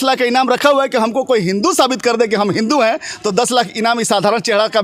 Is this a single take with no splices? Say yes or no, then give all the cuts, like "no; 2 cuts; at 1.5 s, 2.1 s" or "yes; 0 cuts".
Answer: yes; 0 cuts